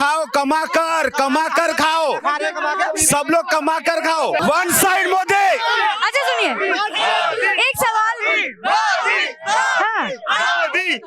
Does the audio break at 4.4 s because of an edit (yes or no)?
yes